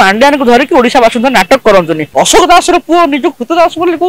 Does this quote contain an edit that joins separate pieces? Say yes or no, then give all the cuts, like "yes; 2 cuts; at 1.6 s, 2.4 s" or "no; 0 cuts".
yes; 1 cut; at 2.0 s